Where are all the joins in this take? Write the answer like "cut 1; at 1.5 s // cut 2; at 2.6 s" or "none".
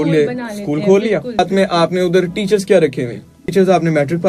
cut 1; at 1.4 s // cut 2; at 3.4 s